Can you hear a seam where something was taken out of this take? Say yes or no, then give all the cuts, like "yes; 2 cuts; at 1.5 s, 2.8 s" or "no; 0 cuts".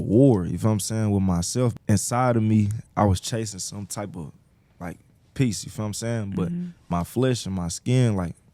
yes; 1 cut; at 1.8 s